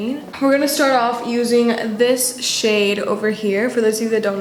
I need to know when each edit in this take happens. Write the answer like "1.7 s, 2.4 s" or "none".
none